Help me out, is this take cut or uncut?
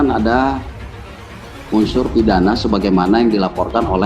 uncut